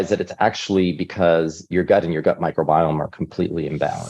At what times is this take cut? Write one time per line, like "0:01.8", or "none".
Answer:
0:01.7

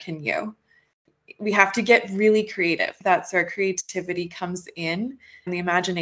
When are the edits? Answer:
none

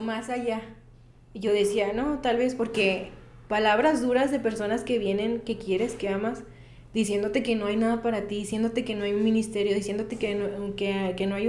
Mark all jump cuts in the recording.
none

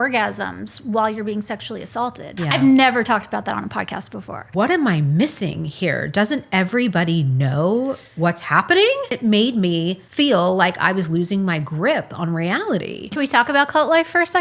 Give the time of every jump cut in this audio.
0:02.2
0:04.5
0:09.1
0:10.0
0:13.1

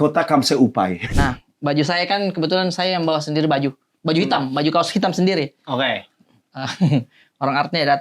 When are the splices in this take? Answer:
0:01.1

